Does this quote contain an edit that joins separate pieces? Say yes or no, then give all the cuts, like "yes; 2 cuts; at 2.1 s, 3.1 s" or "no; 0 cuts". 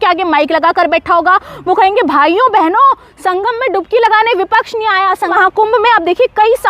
yes; 1 cut; at 5.3 s